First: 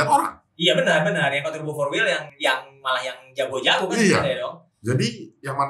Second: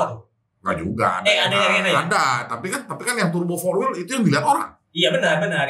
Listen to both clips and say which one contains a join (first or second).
first